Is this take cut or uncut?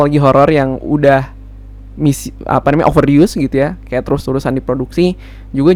uncut